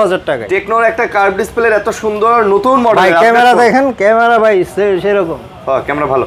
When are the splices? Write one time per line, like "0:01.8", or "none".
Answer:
none